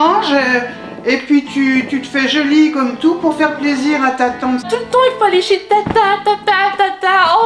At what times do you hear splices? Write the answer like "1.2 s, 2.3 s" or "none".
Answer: none